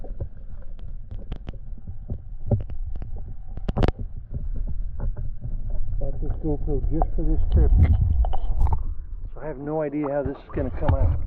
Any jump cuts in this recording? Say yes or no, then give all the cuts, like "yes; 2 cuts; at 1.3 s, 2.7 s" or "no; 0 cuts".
no; 0 cuts